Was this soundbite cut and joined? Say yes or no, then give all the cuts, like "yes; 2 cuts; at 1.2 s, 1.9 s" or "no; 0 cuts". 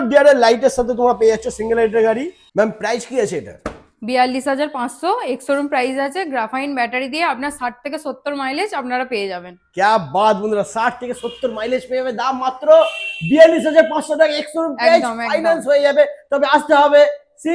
no; 0 cuts